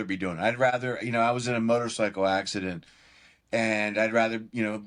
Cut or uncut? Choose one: uncut